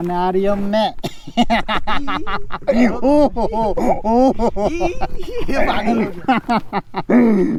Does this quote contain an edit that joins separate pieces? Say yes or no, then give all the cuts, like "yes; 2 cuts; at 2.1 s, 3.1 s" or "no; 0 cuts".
no; 0 cuts